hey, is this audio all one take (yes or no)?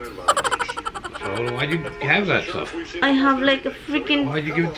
yes